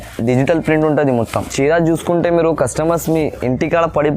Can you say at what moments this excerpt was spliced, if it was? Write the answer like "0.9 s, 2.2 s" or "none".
1.4 s